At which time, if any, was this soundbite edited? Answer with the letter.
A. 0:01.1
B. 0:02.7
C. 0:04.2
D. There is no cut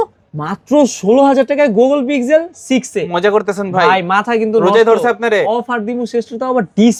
D